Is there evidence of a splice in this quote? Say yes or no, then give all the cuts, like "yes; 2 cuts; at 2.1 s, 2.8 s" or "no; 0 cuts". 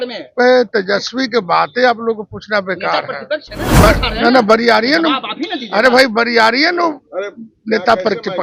yes; 1 cut; at 3.8 s